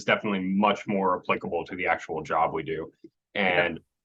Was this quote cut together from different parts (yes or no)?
no